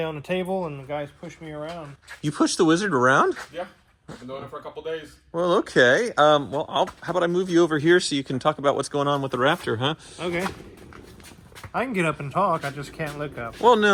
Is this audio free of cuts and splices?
yes; 0 cuts

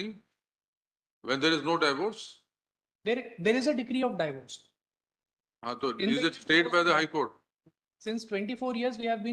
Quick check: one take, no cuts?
yes; 0 cuts

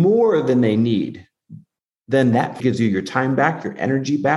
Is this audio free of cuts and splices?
no; 1 cut; at 2.6 s

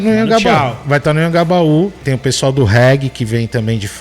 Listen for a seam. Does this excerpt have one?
yes; 1 cut; at 2.1 s

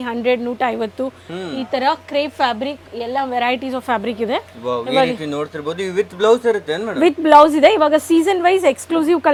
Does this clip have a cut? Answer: no; 0 cuts

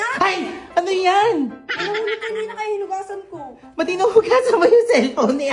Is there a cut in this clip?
no; 0 cuts

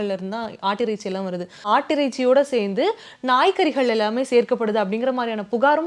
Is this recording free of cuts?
no; 1 cut; at 1.7 s

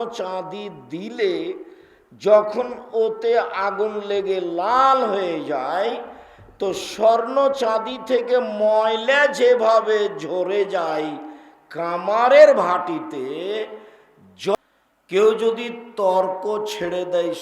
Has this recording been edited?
yes; 1 cut; at 14.5 s

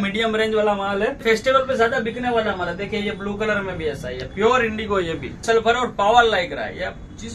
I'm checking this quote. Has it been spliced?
yes; 2 cuts; at 1.2 s, 5.5 s

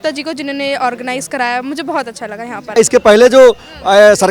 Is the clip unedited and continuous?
no; 1 cut; at 2.8 s

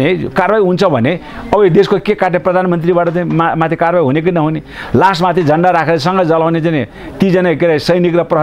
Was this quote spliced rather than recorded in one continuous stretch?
no; 0 cuts

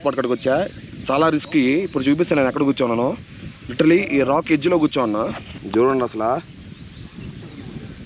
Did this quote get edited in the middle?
yes; 1 cut; at 5.5 s

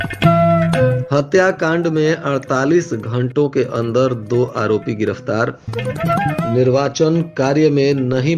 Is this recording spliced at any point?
yes; 1 cut; at 1.0 s

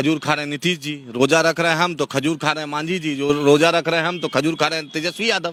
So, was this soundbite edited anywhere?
no; 0 cuts

